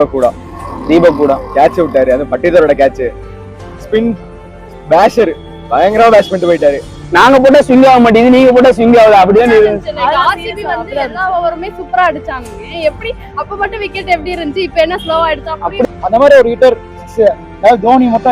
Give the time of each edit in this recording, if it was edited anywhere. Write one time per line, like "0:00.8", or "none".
0:06.9
0:15.9